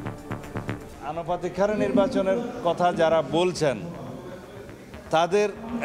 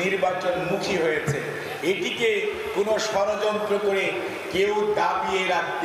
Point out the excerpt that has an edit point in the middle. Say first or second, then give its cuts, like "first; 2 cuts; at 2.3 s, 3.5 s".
first; 1 cut; at 0.9 s